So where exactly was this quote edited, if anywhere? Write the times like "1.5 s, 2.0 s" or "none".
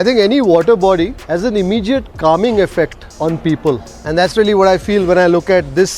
1.2 s, 3.0 s, 3.9 s